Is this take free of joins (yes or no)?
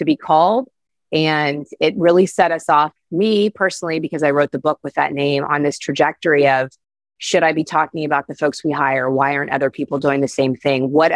yes